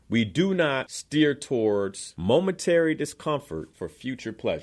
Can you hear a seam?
yes; 3 cuts; at 0.9 s, 2.0 s, 3.7 s

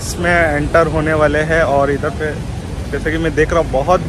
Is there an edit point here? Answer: no; 0 cuts

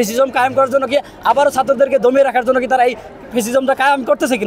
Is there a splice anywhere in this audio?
no; 0 cuts

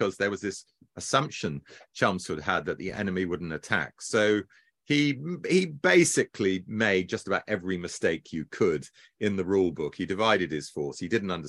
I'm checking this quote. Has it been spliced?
no; 0 cuts

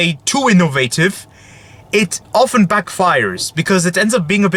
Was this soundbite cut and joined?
no; 0 cuts

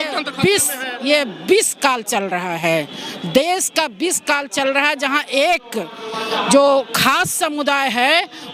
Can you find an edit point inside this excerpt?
no; 0 cuts

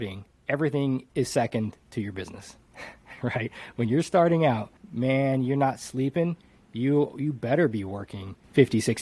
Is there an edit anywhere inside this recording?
no; 0 cuts

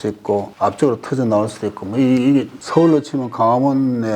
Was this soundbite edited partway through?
no; 0 cuts

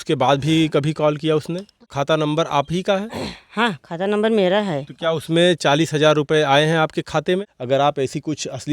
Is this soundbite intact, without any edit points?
no; 2 cuts; at 1.9 s, 7.4 s

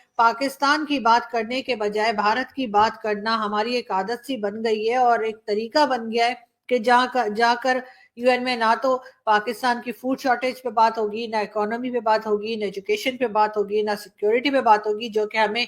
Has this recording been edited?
no; 0 cuts

